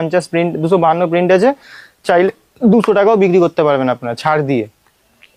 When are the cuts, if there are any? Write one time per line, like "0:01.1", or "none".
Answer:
none